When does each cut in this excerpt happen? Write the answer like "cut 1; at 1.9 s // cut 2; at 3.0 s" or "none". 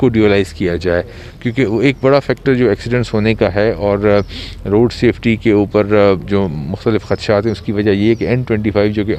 none